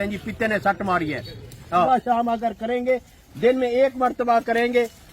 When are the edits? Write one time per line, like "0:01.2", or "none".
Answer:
0:01.9